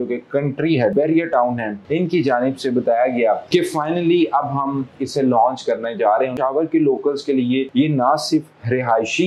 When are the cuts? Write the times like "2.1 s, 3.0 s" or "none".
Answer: 0.9 s, 6.3 s, 7.7 s